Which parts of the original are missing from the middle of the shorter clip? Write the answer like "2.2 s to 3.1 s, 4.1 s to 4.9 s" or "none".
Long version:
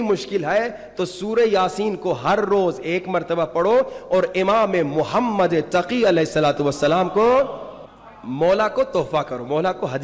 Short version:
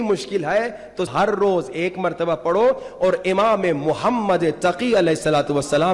1.1 s to 2.2 s